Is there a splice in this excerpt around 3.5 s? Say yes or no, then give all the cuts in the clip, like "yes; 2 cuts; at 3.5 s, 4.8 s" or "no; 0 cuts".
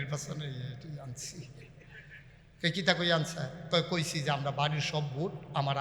yes; 1 cut; at 3.5 s